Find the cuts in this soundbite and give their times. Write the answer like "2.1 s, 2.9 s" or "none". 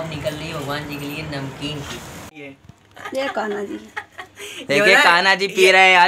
2.4 s